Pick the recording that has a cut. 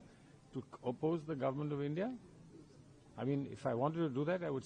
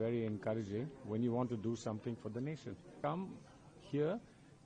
second; 1 cut; at 2.9 s

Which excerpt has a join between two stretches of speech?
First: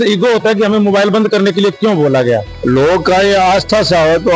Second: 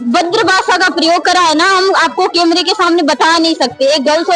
first; 1 cut; at 2.5 s

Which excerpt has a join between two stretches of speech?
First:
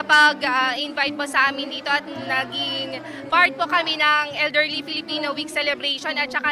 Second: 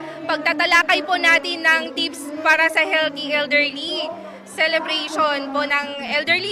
first; 2 cuts; at 0.9 s, 5.6 s

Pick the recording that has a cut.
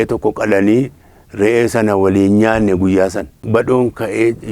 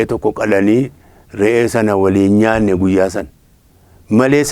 first; 1 cut; at 3.4 s

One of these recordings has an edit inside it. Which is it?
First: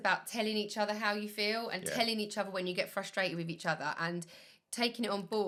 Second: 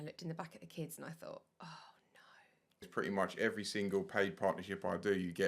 second; 1 cut; at 2.8 s

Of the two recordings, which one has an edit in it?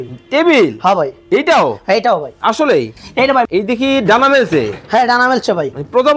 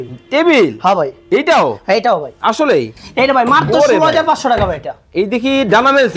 first; 1 cut; at 3.5 s

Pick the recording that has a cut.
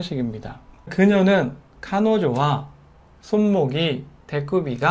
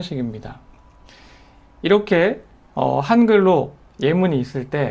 first; 1 cut; at 0.9 s

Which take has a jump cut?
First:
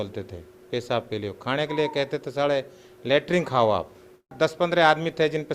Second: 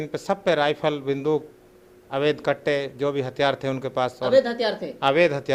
first; 1 cut; at 4.3 s

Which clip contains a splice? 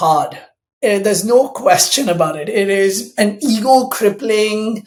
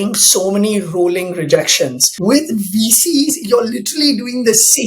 second; 1 cut; at 2.1 s

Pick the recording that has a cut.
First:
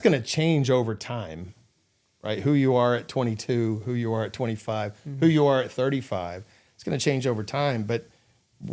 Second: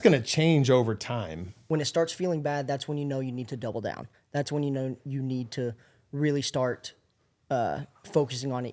second; 1 cut; at 1.5 s

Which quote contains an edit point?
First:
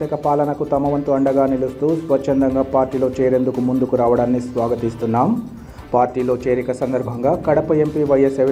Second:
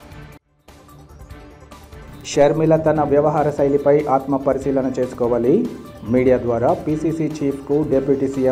second; 1 cut; at 1.9 s

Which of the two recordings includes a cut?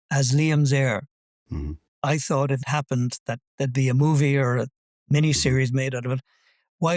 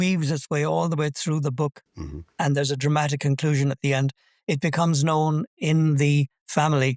first; 2 cuts; at 1.7 s, 2.6 s

